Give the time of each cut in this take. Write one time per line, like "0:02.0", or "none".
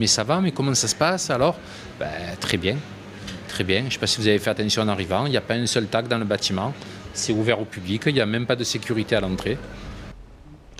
0:02.6